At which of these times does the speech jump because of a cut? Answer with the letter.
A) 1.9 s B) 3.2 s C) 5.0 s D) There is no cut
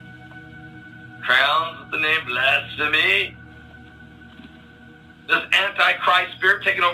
D